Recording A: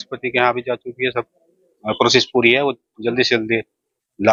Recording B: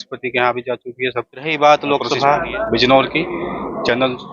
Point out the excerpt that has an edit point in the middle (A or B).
B